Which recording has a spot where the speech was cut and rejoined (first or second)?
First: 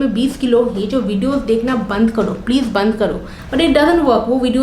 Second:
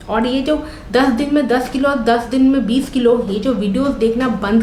first